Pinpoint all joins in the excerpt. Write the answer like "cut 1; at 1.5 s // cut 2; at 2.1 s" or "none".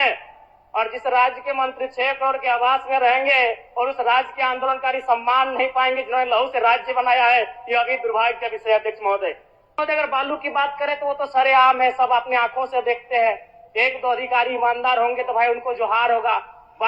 cut 1; at 9.8 s